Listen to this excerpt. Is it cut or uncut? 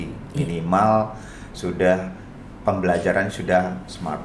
uncut